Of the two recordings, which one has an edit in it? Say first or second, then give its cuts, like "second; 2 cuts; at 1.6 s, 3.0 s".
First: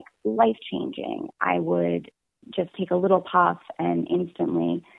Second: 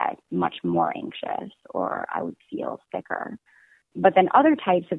second; 1 cut; at 3.8 s